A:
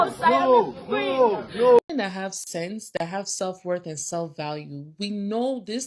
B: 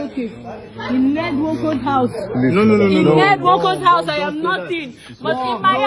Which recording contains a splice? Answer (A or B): A